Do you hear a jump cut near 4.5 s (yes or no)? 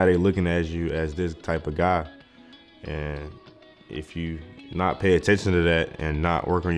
yes